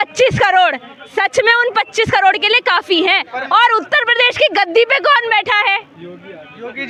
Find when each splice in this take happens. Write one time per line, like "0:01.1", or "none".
none